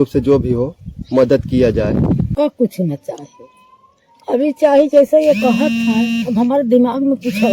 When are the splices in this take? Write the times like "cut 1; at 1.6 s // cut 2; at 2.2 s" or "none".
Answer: cut 1; at 2.3 s